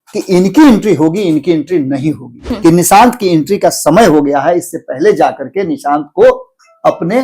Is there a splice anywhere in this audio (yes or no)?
yes